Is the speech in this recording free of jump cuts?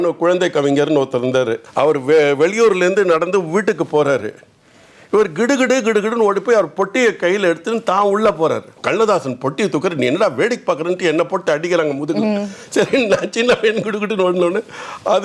no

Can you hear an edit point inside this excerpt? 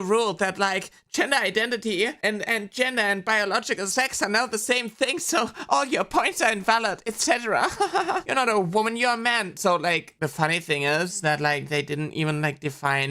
no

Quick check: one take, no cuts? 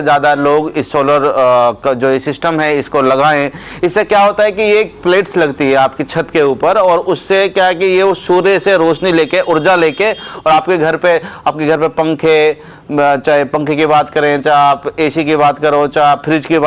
yes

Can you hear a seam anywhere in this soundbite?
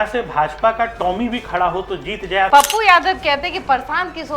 yes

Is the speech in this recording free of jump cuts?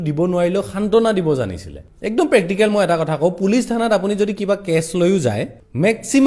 yes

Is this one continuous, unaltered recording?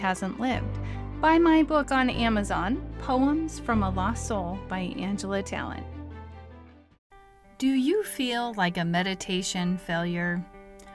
no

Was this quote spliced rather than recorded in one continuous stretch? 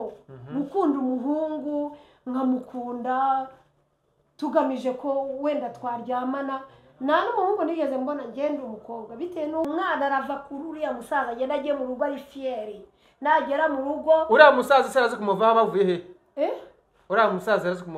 yes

